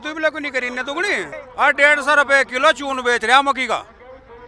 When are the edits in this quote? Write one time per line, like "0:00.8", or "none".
0:01.3